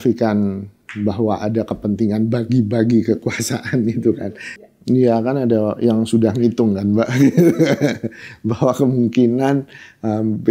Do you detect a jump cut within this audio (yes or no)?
yes